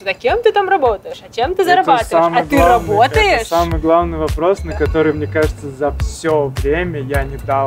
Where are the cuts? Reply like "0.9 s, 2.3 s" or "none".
none